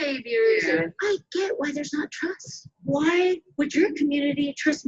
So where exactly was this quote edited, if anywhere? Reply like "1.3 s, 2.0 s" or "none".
0.9 s, 2.8 s